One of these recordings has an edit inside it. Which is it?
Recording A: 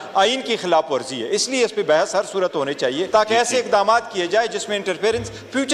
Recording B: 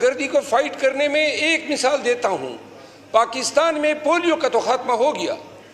A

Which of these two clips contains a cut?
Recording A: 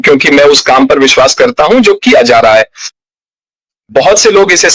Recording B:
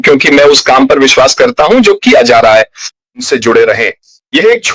B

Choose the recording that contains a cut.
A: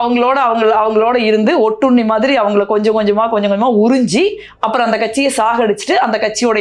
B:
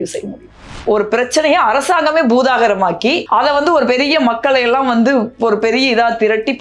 B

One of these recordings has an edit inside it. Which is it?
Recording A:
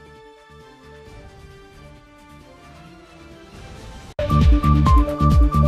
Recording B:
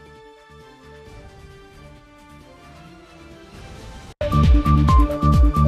B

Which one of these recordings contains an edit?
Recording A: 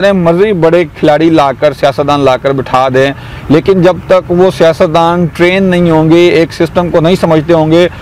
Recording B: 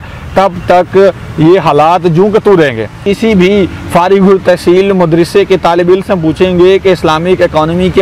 B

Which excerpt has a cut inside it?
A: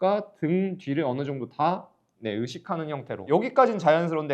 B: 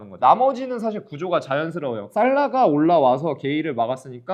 A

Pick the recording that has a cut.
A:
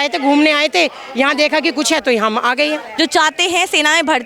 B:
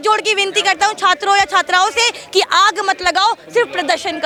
A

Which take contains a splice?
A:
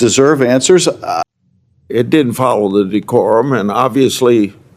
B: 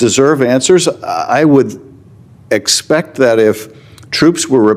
A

